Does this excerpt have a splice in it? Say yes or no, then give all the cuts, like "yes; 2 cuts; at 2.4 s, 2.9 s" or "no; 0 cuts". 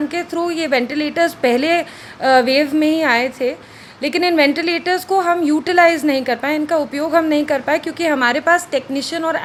no; 0 cuts